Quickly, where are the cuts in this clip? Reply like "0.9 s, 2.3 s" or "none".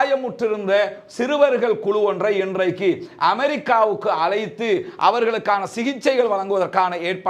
none